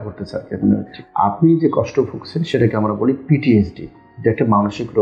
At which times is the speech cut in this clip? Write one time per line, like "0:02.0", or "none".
0:00.9